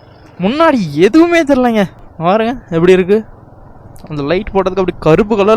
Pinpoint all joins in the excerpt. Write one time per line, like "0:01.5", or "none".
0:02.0